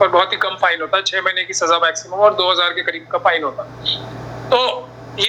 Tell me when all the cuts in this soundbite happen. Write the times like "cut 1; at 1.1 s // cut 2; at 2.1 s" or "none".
none